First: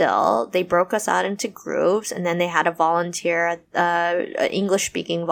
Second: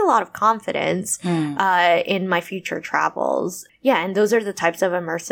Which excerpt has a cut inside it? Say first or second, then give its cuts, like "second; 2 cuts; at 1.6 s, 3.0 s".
second; 1 cut; at 3.6 s